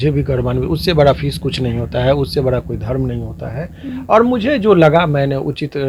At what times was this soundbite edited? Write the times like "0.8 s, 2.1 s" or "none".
none